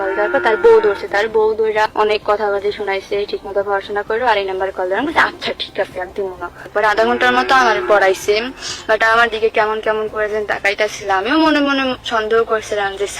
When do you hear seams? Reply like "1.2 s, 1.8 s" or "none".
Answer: 1.9 s, 6.6 s